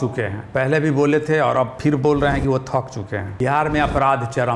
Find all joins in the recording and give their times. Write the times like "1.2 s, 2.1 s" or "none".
3.2 s